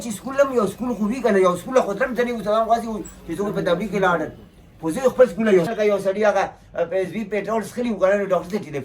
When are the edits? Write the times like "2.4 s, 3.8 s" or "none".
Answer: 5.7 s